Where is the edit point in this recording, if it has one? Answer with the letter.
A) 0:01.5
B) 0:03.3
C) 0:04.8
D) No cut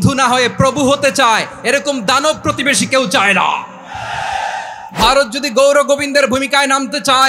C